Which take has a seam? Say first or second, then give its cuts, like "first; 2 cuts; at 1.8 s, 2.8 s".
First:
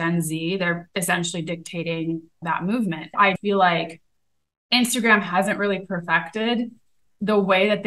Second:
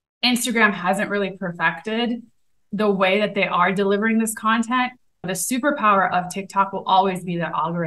first; 1 cut; at 3.4 s